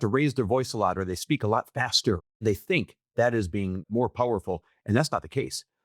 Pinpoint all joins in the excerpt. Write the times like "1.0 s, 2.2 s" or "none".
2.3 s, 3.8 s

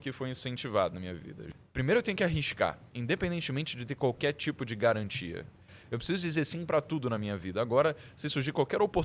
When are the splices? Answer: 1.3 s, 5.8 s

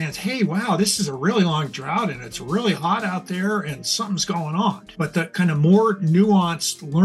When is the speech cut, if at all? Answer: 4.9 s

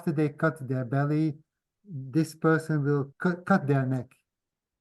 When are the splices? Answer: 3.1 s

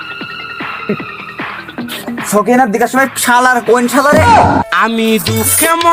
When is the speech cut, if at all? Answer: none

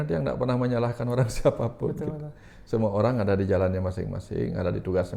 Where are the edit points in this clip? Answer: none

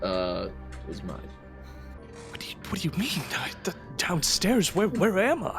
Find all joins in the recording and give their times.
2.0 s

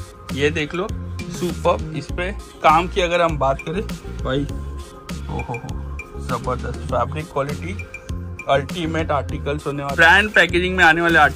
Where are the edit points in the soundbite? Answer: 9.9 s

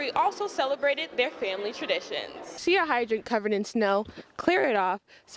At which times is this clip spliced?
2.6 s

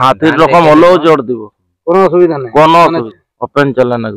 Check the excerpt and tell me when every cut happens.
3.1 s

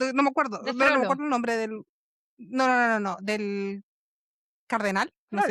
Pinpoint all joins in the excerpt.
none

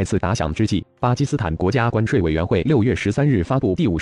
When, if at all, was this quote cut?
2.6 s

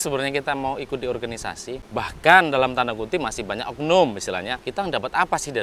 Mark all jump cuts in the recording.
1.8 s, 4.6 s

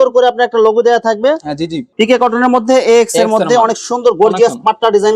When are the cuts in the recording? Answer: 1.9 s

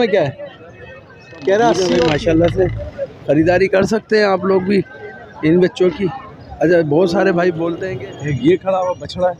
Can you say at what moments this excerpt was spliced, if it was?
1.8 s, 7.8 s

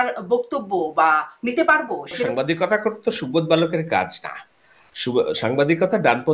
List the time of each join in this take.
2.3 s

